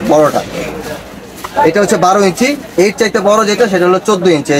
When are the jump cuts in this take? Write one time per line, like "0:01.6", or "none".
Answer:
none